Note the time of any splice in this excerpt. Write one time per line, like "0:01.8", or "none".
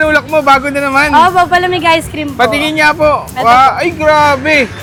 none